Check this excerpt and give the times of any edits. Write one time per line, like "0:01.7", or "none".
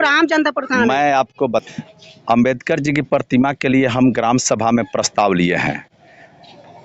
0:01.6